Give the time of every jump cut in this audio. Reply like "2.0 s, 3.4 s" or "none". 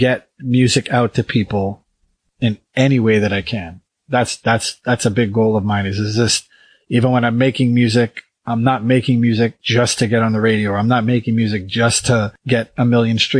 2.2 s, 9.6 s, 12.4 s